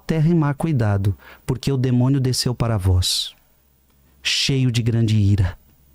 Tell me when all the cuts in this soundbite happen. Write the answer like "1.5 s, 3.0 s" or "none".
none